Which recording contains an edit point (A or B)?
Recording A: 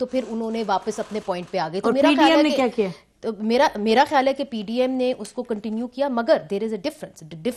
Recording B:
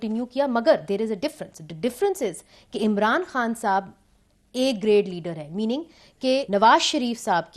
B